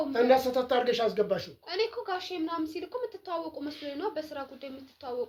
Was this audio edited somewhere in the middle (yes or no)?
no